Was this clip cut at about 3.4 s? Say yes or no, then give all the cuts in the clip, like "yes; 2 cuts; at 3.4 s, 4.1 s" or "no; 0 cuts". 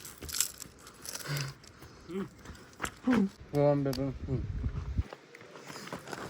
yes; 1 cut; at 3.4 s